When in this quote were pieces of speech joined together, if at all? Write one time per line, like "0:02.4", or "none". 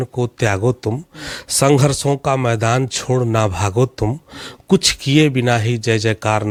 none